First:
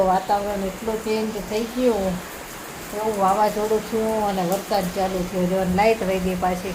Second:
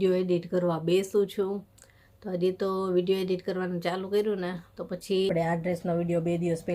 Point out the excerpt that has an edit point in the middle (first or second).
second